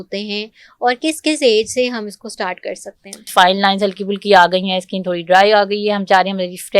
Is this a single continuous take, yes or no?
no